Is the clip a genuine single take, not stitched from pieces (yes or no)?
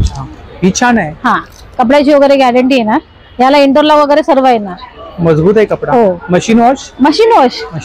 yes